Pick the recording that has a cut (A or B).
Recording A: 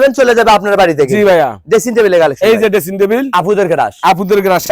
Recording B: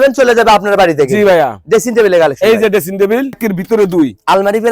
B